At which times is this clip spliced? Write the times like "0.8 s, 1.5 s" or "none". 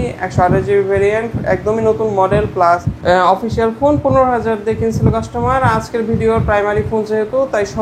2.9 s